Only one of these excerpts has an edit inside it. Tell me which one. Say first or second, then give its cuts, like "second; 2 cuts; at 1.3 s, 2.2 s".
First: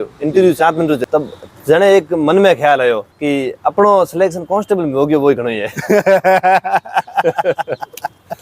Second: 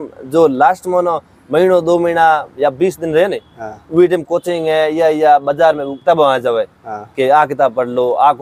first; 1 cut; at 1.0 s